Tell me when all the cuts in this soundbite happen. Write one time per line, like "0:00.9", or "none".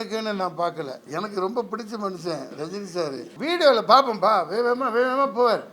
0:01.0
0:03.3